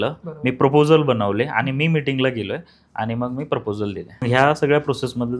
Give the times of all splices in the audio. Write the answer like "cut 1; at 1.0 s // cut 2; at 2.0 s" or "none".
cut 1; at 4.2 s